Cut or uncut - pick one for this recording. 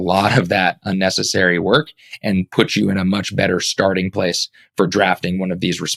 uncut